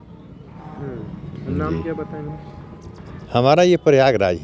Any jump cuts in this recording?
yes; 1 cut; at 3.1 s

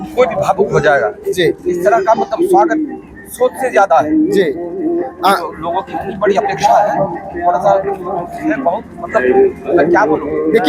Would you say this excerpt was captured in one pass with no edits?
yes; 0 cuts

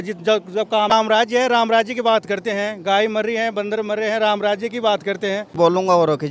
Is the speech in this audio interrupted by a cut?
yes; 2 cuts; at 0.9 s, 5.5 s

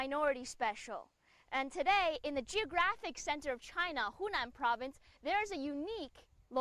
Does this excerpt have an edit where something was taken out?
yes; 1 cut; at 4.5 s

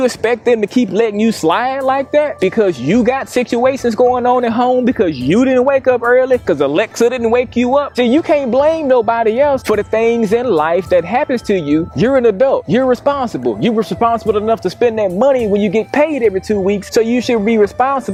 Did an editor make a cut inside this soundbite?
no; 0 cuts

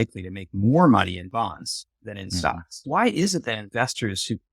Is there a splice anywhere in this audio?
yes; 1 cut; at 2.7 s

